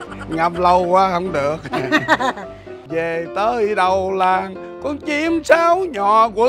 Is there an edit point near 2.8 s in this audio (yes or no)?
yes